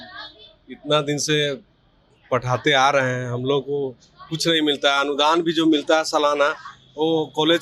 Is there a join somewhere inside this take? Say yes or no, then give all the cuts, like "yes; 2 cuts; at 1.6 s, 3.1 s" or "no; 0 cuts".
no; 0 cuts